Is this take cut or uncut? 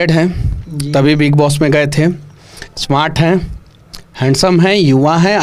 uncut